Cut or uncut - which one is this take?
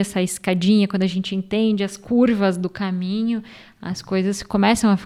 uncut